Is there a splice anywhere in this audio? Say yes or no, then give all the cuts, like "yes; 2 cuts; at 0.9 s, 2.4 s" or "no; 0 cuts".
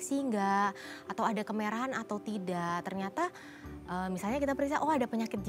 no; 0 cuts